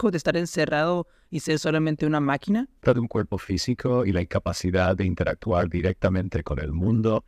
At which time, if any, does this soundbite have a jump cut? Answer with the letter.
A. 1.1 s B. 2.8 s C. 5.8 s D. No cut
B